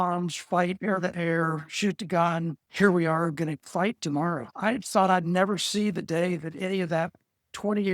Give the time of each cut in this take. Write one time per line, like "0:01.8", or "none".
0:02.6